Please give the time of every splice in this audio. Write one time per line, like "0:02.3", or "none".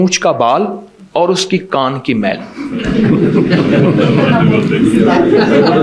none